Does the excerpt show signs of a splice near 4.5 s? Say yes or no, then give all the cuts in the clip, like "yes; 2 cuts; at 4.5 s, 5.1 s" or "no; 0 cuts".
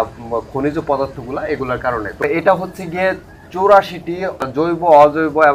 yes; 2 cuts; at 2.2 s, 4.5 s